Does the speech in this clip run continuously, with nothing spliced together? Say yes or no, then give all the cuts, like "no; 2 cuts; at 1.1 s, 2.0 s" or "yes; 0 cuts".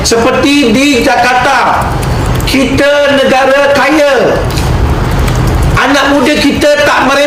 yes; 0 cuts